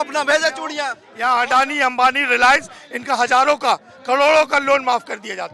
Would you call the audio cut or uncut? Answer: cut